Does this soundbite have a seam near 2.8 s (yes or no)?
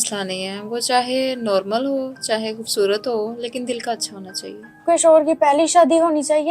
no